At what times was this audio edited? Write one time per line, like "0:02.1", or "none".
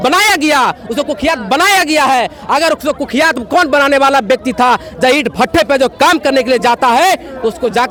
none